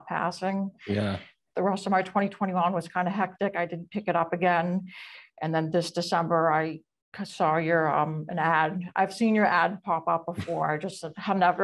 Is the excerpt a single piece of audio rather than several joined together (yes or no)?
no